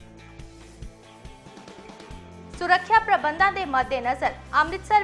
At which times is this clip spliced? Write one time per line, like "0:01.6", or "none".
0:02.1